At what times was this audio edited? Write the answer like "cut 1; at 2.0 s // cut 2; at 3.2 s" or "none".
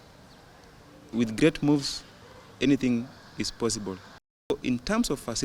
cut 1; at 4.5 s